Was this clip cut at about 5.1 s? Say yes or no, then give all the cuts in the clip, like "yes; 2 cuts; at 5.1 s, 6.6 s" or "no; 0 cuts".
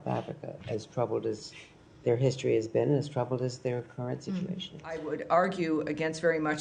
yes; 1 cut; at 5.1 s